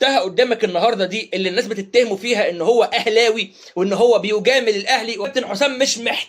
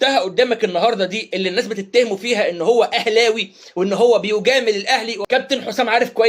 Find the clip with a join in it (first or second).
first